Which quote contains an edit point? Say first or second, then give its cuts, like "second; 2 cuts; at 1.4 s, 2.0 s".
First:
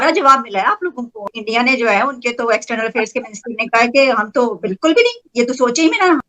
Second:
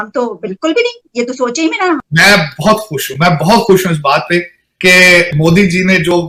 first; 1 cut; at 1.2 s